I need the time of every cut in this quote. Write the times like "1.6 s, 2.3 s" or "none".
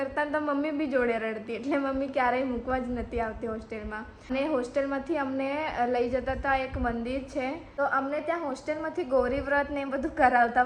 4.3 s, 7.7 s